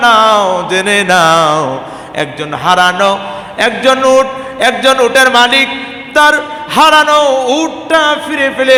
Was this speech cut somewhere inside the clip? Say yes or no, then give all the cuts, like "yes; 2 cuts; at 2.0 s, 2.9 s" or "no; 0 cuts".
no; 0 cuts